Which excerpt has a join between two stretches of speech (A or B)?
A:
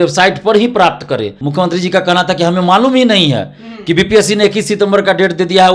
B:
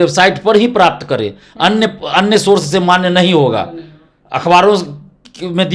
A